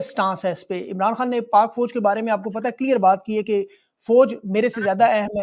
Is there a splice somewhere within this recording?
no; 0 cuts

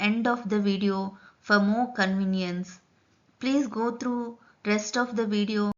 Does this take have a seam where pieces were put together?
no; 0 cuts

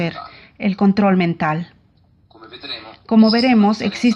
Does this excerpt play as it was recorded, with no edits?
no; 1 cut; at 1.4 s

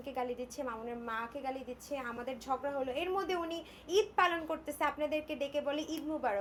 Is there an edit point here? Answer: no; 0 cuts

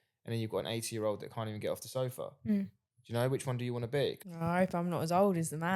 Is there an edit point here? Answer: yes; 1 cut; at 4.2 s

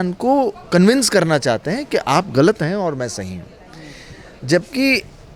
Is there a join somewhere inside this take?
no; 0 cuts

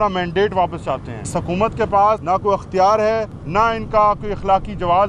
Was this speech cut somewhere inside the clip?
yes; 1 cut; at 1.3 s

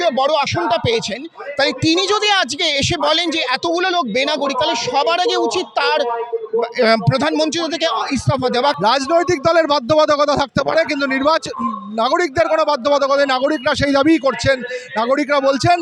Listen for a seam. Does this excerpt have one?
yes; 1 cut; at 8.8 s

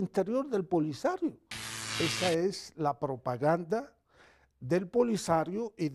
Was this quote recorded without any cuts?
no; 1 cut; at 1.9 s

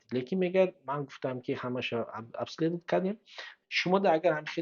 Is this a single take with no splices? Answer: no; 1 cut; at 3.6 s

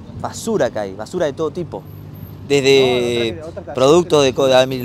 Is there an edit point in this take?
no; 0 cuts

